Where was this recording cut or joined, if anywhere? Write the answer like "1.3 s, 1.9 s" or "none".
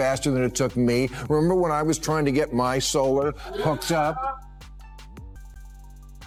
none